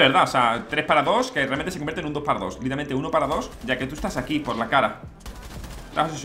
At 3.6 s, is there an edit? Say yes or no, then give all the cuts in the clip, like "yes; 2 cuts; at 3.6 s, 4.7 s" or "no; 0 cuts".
yes; 1 cut; at 3.6 s